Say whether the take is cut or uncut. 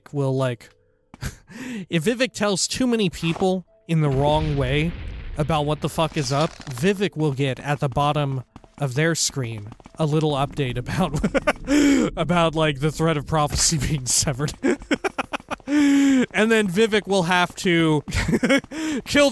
cut